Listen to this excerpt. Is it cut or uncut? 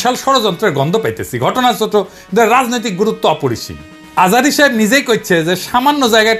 uncut